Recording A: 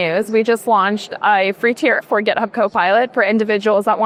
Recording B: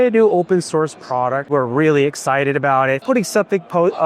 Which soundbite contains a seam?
B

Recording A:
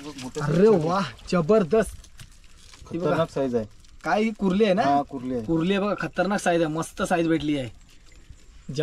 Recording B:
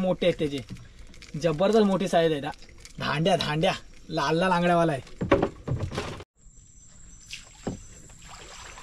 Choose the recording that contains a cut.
B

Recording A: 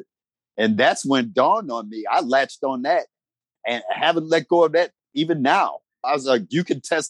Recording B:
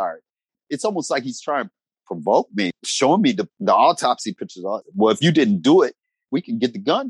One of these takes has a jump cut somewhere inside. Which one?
B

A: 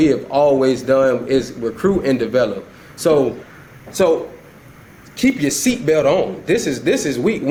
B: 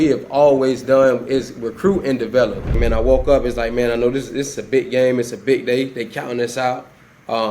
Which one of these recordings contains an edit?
B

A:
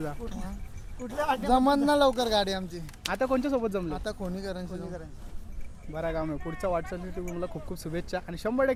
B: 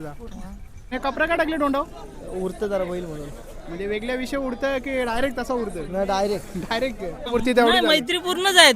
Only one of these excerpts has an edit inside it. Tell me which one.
B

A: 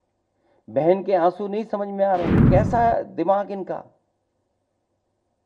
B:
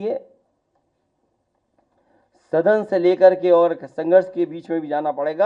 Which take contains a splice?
A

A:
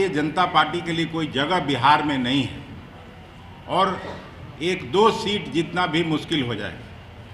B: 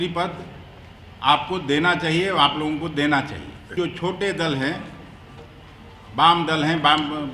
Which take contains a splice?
B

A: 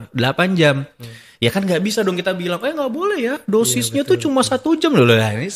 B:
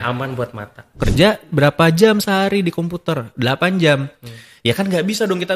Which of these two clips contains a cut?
B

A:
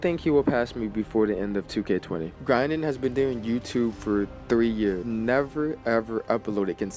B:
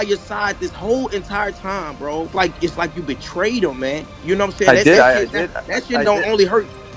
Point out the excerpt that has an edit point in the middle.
A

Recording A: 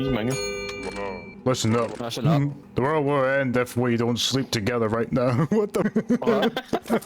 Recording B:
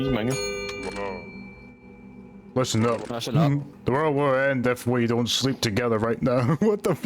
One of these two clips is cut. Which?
A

